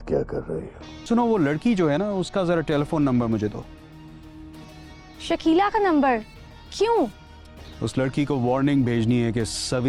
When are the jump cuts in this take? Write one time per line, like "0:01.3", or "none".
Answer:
0:01.0